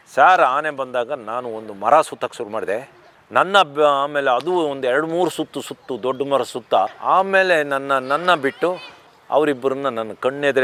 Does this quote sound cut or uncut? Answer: uncut